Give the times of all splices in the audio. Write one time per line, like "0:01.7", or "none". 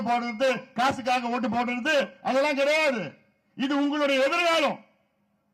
none